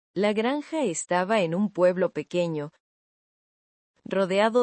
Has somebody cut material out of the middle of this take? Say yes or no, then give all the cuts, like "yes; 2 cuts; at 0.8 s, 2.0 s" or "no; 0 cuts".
no; 0 cuts